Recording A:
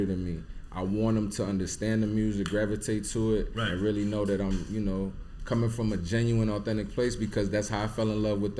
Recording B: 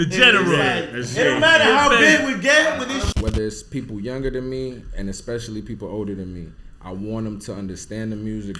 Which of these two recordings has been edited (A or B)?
B